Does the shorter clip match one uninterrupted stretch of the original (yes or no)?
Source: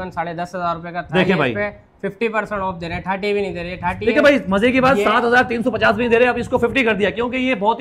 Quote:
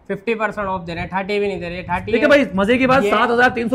yes